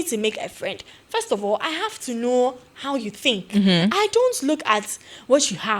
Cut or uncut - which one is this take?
uncut